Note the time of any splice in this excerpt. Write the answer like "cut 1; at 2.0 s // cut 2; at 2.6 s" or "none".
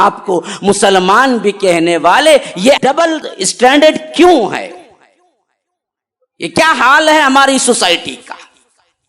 cut 1; at 3.1 s